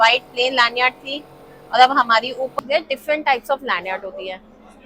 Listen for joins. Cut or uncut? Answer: cut